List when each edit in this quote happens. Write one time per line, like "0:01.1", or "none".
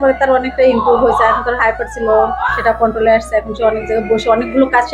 none